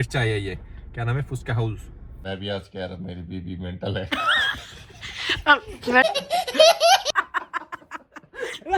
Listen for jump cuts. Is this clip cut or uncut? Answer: cut